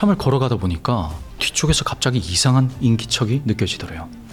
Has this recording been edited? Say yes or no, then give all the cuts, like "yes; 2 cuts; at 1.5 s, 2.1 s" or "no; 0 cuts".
no; 0 cuts